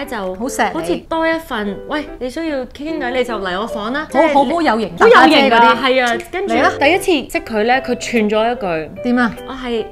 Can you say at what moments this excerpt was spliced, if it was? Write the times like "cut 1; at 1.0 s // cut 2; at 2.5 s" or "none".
cut 1; at 6.8 s